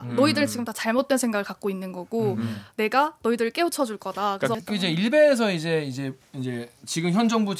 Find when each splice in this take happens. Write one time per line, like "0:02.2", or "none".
0:04.6